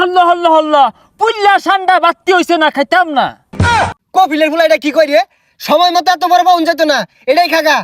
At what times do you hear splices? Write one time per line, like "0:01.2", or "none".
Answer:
0:03.6